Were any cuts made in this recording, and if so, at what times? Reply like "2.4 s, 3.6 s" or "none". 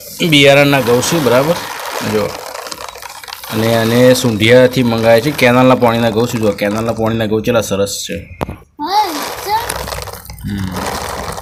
none